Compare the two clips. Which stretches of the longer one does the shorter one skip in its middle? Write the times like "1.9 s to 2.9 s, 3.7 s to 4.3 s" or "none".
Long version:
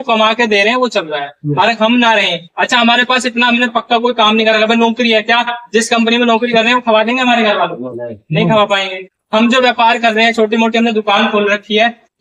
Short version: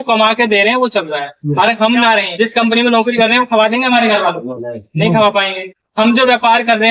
2.3 s to 5.6 s